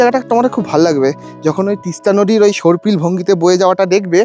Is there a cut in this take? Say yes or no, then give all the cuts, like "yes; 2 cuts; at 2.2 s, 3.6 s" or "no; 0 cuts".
no; 0 cuts